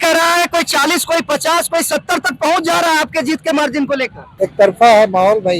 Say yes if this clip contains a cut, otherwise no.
yes